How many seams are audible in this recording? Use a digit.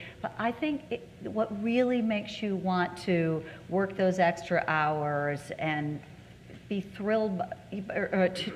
1